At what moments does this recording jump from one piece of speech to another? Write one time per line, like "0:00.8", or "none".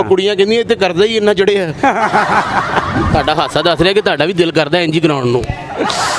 0:03.0